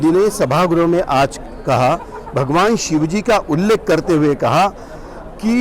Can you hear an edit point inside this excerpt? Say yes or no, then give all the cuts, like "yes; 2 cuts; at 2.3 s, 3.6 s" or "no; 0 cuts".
no; 0 cuts